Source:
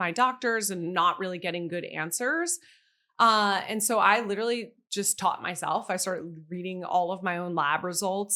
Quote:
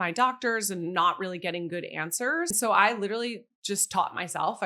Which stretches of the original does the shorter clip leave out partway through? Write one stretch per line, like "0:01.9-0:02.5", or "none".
0:02.5-0:03.8

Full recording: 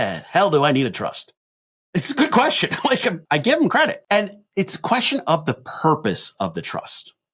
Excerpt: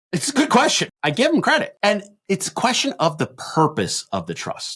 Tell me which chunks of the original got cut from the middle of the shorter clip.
0:02.7-0:03.2

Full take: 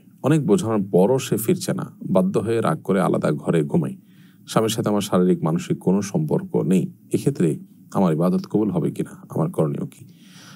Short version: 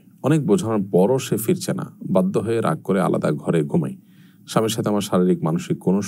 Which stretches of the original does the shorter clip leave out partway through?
none

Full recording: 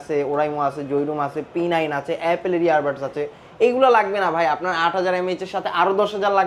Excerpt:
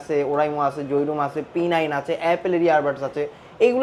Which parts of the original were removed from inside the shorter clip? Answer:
none

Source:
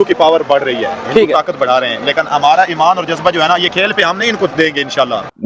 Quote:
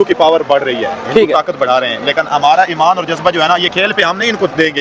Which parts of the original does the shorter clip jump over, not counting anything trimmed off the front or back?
none

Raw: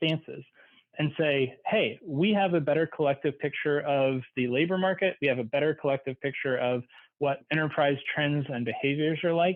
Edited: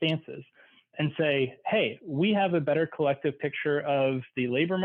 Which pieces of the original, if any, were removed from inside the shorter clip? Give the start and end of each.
none

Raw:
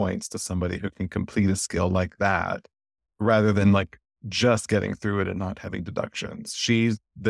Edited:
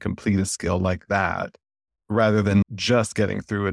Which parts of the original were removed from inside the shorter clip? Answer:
0:03.7-0:04.2

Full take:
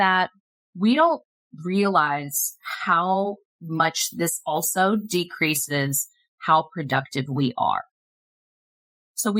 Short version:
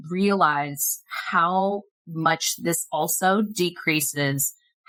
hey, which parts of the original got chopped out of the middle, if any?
none

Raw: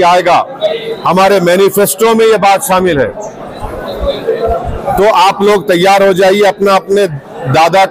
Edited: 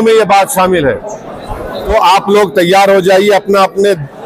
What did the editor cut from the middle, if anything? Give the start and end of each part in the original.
0:04.0-0:05.0

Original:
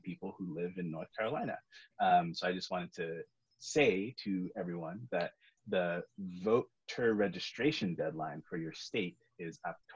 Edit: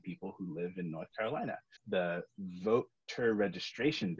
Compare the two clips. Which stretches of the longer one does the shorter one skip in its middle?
0:01.7-0:05.5

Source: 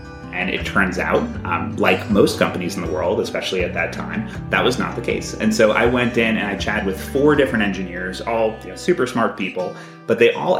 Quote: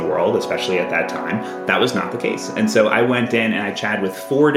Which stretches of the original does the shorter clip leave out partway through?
none

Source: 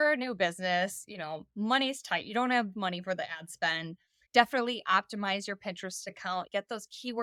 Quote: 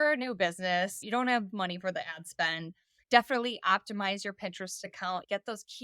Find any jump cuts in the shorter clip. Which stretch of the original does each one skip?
0:01.0-0:02.2

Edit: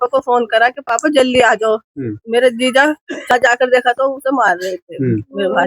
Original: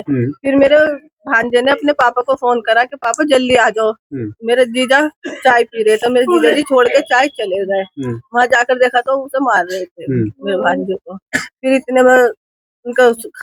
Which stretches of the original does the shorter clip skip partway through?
0:05.5-0:08.4

